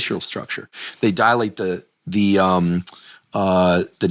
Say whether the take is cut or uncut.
uncut